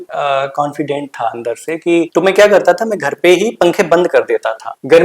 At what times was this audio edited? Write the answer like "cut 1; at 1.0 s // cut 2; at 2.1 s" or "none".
cut 1; at 2.1 s